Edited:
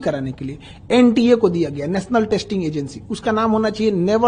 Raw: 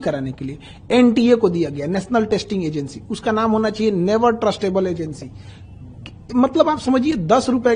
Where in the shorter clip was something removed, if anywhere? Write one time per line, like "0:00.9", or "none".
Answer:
none